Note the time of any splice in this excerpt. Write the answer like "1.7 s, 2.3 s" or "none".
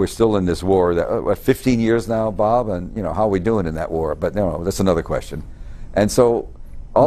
1.3 s